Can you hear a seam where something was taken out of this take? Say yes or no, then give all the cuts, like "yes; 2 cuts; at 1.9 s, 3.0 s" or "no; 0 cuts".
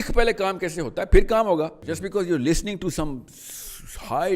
yes; 1 cut; at 1.8 s